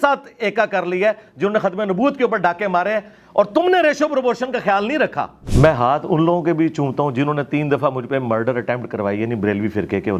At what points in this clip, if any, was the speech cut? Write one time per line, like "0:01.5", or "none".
0:05.4